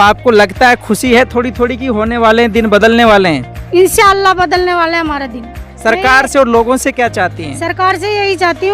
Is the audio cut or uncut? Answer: cut